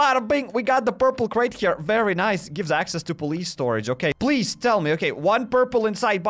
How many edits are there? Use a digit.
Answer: 1